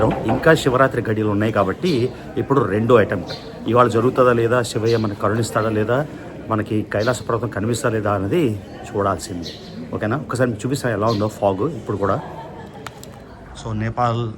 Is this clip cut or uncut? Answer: uncut